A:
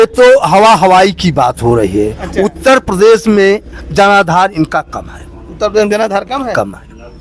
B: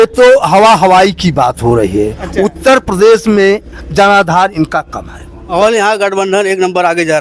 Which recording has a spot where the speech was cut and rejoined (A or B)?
B